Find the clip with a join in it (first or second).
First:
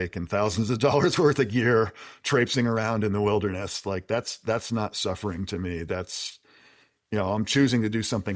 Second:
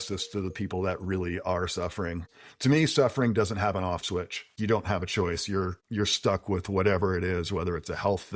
second